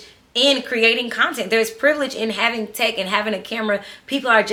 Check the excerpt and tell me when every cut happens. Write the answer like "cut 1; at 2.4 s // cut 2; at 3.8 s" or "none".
none